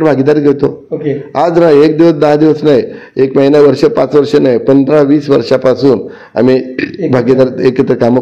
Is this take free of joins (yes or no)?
yes